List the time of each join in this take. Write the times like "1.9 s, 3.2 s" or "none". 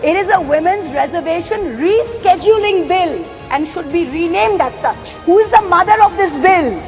5.2 s